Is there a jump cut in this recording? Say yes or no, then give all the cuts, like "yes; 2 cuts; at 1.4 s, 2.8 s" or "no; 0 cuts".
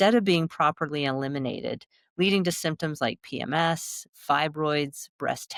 no; 0 cuts